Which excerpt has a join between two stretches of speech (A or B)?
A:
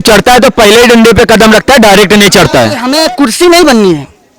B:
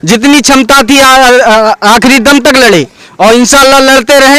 A